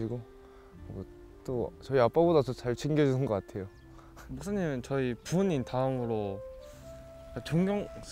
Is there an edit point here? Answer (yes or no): yes